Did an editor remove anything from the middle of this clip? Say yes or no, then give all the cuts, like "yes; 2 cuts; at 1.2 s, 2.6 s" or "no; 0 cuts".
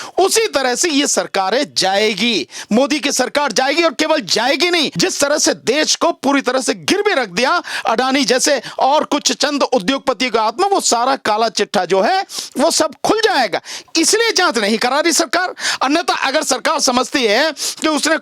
yes; 1 cut; at 4.9 s